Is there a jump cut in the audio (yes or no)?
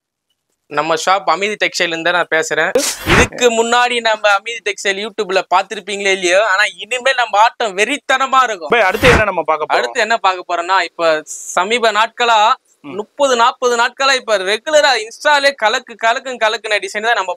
yes